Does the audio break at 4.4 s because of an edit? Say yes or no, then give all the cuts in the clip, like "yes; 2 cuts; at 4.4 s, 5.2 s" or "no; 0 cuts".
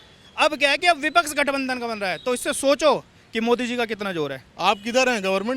yes; 1 cut; at 4.4 s